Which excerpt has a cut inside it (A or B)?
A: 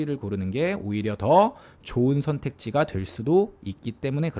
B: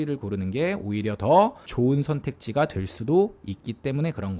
B